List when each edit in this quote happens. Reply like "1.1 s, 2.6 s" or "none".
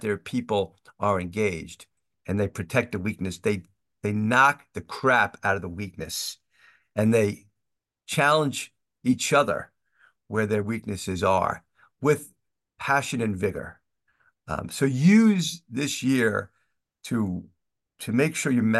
2.1 s

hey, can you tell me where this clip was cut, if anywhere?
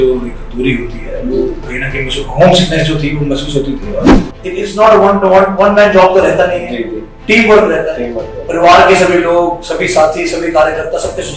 4.2 s

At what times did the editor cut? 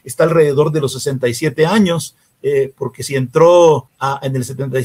3.9 s

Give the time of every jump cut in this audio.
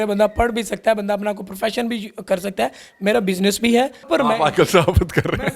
0.9 s, 2.8 s, 4.0 s

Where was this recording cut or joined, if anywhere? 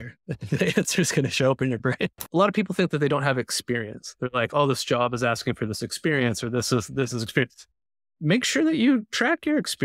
2.2 s

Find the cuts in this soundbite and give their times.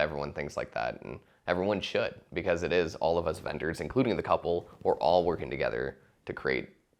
none

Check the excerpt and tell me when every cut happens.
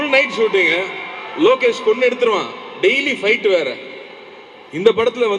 none

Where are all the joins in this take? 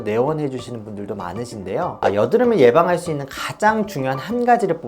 2.0 s

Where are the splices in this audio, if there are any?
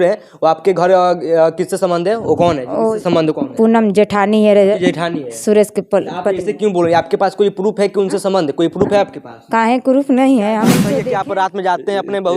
10.8 s

